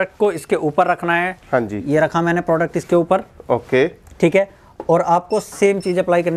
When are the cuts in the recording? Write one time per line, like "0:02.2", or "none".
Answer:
none